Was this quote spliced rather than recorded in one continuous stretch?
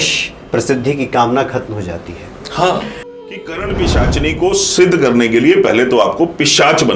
yes; 1 cut; at 3.1 s

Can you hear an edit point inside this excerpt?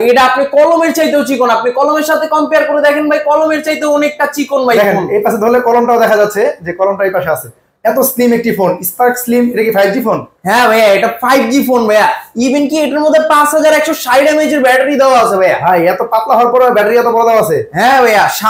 no; 0 cuts

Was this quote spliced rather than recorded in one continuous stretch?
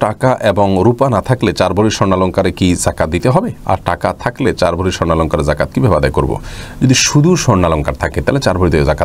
no; 0 cuts

